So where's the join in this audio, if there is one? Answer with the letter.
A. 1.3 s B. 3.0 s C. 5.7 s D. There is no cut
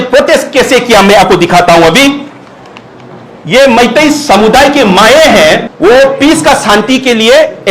C